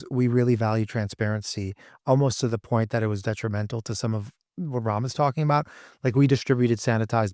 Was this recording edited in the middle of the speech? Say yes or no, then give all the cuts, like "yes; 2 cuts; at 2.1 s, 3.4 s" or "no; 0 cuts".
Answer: no; 0 cuts